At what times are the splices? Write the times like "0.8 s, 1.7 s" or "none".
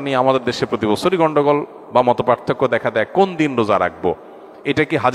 none